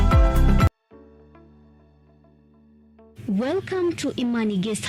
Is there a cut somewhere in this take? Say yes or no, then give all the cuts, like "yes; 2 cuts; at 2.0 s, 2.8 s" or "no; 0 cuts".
no; 0 cuts